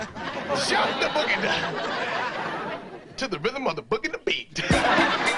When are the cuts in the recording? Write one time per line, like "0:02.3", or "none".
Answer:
0:02.6